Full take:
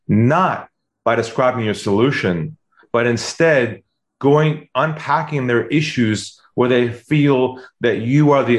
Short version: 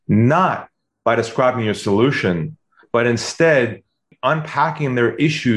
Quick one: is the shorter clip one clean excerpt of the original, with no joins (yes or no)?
no